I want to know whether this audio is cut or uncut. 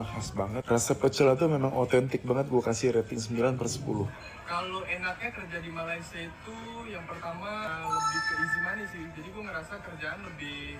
cut